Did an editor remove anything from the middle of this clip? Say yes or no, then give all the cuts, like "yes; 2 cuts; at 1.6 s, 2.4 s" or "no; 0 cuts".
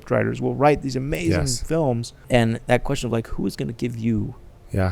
yes; 1 cut; at 2.1 s